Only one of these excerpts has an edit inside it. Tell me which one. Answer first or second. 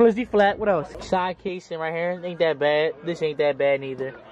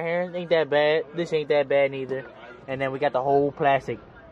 first